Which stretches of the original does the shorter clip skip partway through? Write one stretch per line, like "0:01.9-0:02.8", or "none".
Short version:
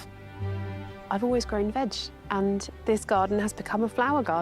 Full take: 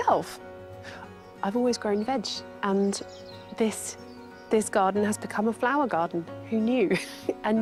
0:03.0-0:04.4